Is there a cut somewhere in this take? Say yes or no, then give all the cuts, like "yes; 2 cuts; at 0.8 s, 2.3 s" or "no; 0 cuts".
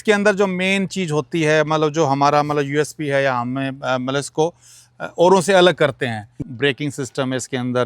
yes; 1 cut; at 6.4 s